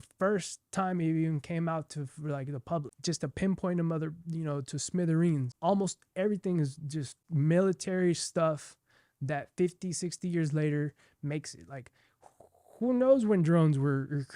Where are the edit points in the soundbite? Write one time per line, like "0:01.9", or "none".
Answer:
0:02.9
0:05.5
0:07.2